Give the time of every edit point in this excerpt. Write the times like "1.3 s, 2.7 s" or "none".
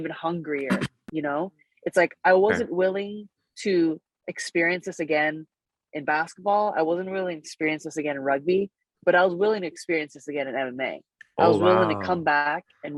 none